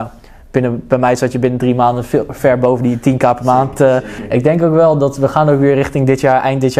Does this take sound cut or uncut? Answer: cut